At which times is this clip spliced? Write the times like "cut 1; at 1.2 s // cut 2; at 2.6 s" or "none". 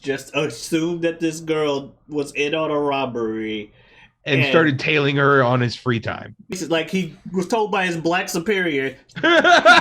cut 1; at 6.5 s